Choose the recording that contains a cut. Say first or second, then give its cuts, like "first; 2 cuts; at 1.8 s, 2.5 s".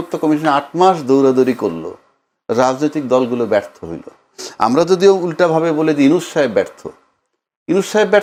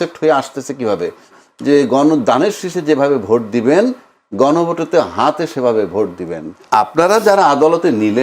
second; 2 cuts; at 1.4 s, 6.5 s